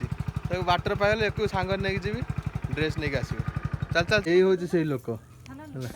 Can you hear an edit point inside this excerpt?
yes; 1 cut; at 4.2 s

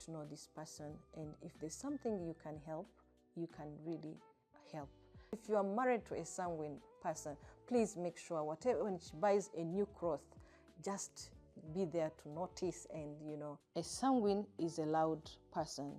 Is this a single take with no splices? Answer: no; 2 cuts; at 5.4 s, 13.6 s

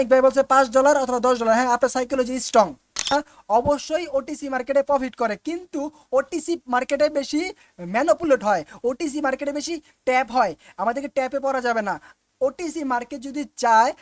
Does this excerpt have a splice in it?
yes; 1 cut; at 3.1 s

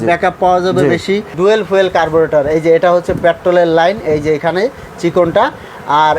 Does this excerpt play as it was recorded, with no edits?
no; 1 cut; at 1.3 s

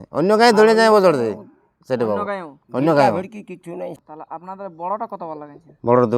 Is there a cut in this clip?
yes; 1 cut; at 4.0 s

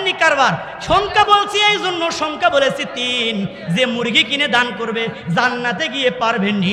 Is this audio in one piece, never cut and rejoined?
yes; 0 cuts

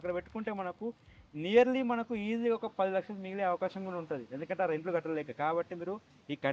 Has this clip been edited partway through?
no; 0 cuts

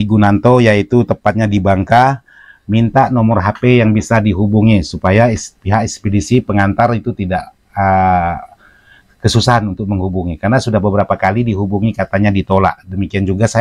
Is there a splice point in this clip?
no; 0 cuts

